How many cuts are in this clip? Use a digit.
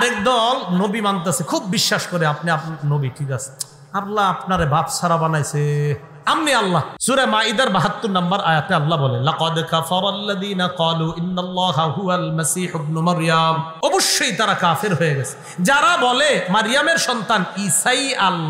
2